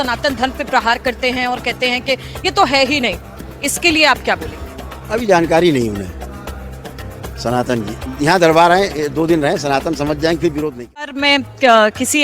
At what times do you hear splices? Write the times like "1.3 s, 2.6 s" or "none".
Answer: 11.2 s